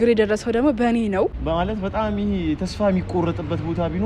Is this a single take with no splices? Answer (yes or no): no